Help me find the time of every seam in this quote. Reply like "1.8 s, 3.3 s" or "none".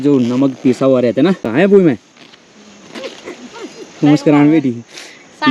1.5 s